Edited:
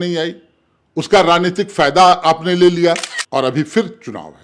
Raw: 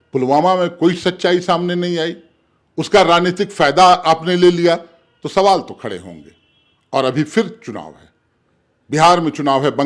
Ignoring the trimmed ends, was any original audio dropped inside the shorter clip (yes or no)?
yes